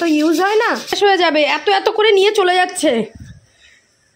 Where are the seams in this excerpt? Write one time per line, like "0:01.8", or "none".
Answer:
0:01.0